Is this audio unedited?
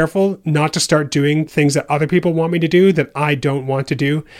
no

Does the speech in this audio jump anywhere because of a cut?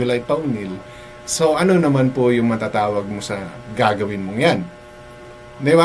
no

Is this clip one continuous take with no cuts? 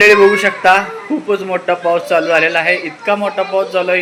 yes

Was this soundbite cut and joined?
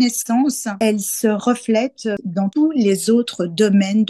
yes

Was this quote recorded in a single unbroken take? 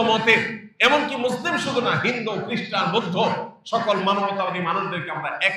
yes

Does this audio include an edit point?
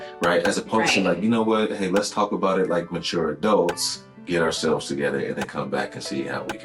yes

